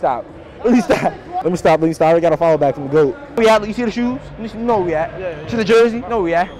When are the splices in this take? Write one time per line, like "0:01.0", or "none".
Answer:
0:01.3
0:03.2